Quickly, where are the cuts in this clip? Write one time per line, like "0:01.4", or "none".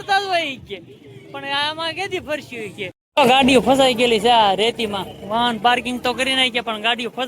0:03.0